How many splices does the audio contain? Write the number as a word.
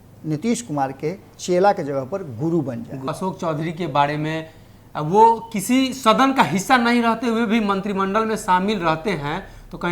one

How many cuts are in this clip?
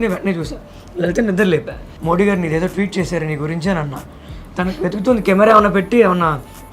two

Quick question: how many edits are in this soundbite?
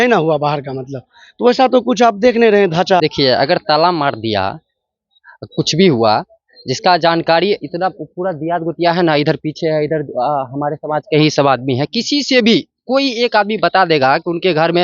one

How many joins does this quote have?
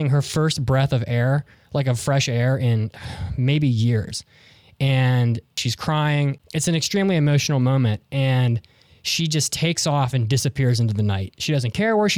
three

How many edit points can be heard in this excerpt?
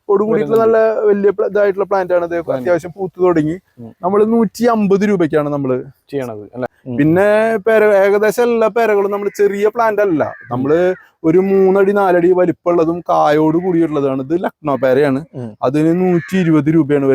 one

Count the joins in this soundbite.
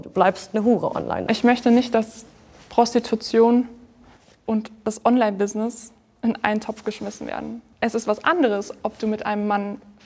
one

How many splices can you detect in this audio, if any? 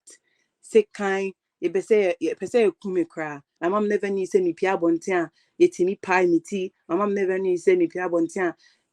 one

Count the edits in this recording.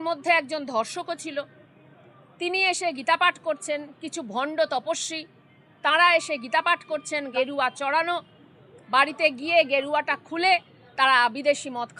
one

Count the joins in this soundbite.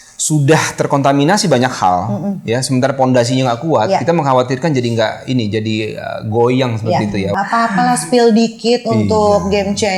one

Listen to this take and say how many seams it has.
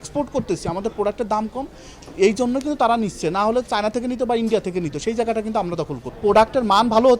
one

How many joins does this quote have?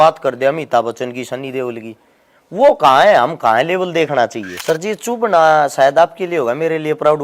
one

